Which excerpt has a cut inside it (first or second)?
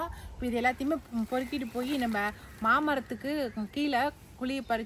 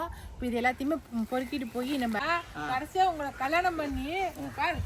second